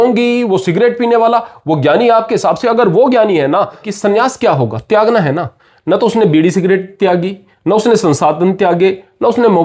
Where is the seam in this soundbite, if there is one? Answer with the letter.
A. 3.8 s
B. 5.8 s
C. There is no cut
A